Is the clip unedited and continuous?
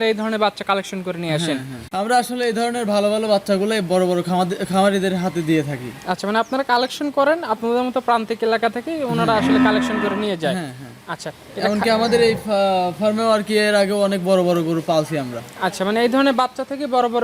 no; 1 cut; at 1.8 s

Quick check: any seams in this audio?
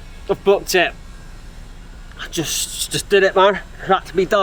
no; 0 cuts

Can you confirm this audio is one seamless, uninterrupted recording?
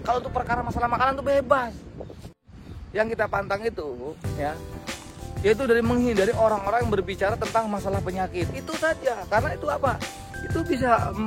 no; 1 cut; at 2.3 s

